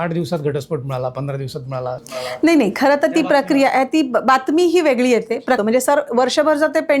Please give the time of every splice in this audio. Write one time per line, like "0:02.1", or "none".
0:05.6